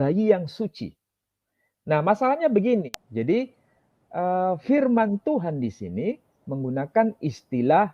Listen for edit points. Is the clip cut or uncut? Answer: cut